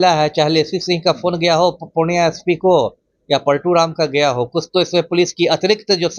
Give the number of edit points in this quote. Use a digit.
0